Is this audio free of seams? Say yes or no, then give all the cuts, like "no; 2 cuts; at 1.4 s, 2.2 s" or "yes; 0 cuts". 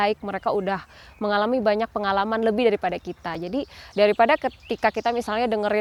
yes; 0 cuts